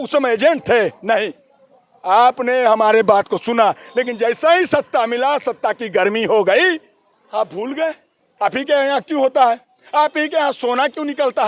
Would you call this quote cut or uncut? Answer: cut